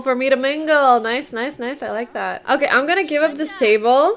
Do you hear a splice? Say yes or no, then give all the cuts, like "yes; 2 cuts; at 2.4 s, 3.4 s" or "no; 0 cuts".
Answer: no; 0 cuts